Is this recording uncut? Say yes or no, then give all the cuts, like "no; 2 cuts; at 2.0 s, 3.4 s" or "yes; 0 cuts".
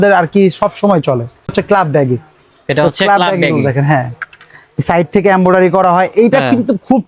no; 1 cut; at 1.5 s